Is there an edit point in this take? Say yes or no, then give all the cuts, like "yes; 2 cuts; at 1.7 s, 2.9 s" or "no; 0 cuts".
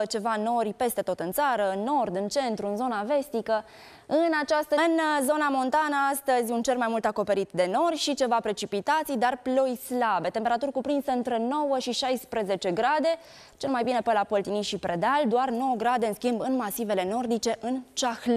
no; 0 cuts